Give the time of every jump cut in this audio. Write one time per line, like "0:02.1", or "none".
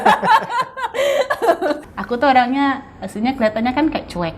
0:01.9